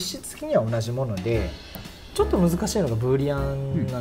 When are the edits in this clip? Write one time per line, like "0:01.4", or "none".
0:01.7